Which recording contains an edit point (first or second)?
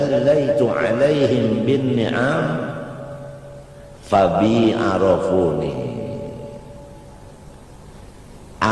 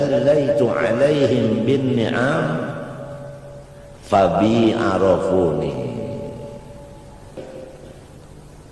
second